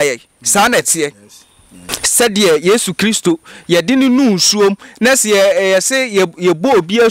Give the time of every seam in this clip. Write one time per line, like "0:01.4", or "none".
0:01.9